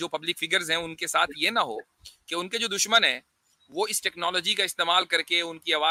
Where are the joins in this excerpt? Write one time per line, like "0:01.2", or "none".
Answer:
none